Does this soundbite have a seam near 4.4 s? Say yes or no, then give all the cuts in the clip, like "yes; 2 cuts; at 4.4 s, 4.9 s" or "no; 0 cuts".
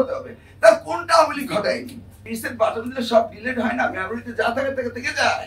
no; 1 cut; at 2.4 s